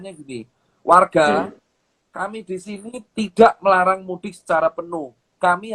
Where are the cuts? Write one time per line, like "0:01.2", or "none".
none